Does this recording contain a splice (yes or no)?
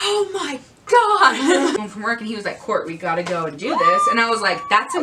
yes